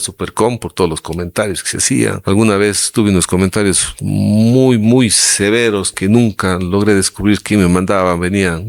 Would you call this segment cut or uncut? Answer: cut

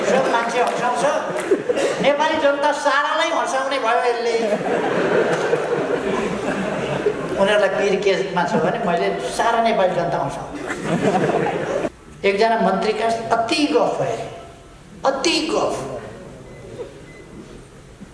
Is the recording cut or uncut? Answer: cut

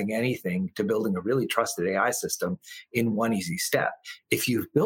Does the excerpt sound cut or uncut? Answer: uncut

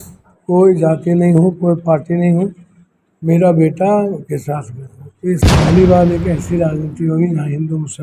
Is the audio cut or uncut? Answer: cut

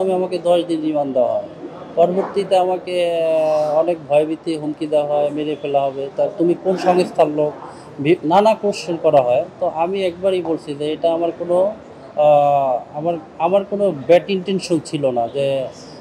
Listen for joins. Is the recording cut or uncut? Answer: uncut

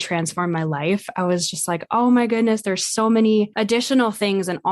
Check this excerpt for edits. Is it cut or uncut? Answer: cut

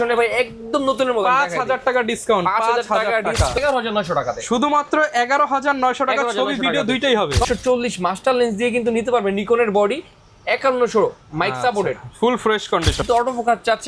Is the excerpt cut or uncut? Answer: cut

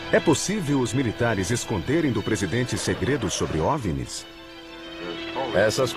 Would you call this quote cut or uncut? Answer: uncut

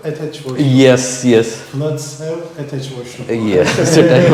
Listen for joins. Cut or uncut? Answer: uncut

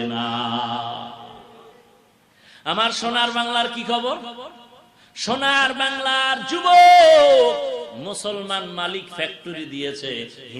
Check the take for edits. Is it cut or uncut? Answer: uncut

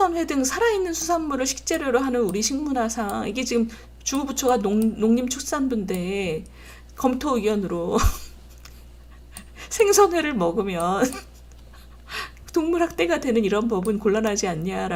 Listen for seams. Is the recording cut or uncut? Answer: uncut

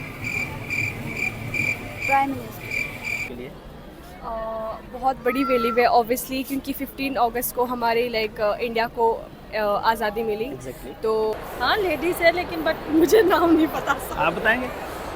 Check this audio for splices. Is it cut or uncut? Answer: cut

